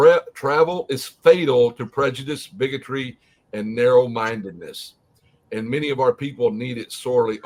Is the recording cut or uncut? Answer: uncut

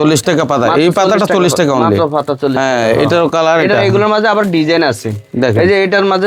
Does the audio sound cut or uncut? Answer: uncut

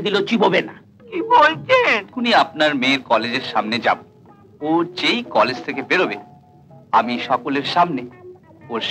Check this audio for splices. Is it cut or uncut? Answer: cut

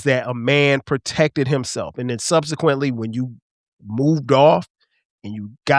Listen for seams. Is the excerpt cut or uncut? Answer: uncut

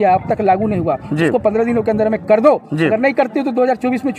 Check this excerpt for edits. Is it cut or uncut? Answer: uncut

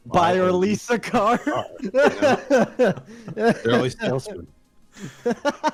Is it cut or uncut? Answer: uncut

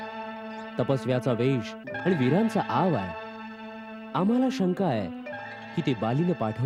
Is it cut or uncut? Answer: uncut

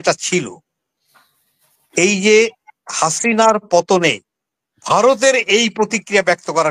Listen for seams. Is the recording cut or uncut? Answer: uncut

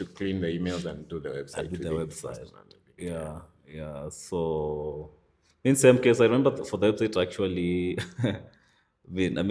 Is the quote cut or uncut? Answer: uncut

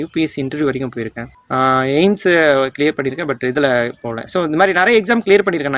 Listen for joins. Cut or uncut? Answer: cut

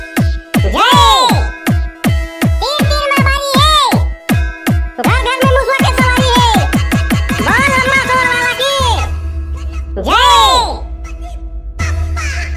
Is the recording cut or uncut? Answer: uncut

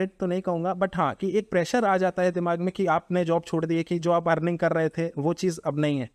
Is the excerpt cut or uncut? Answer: uncut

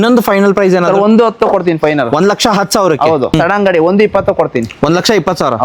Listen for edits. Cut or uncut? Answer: cut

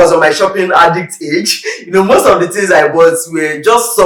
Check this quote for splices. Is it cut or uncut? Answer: uncut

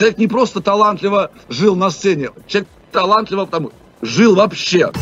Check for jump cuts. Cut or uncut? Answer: uncut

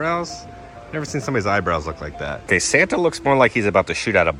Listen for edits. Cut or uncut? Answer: cut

